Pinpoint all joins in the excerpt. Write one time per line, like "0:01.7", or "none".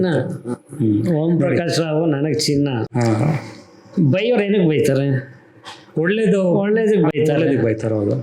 none